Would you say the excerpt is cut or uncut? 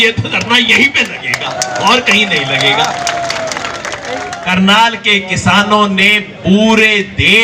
cut